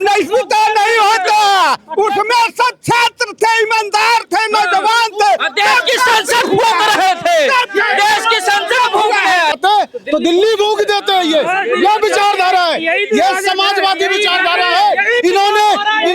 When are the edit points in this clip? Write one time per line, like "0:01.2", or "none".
0:09.5